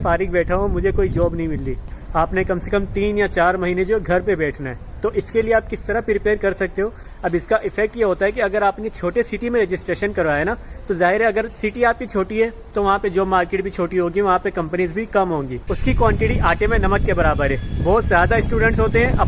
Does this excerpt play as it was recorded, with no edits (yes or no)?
no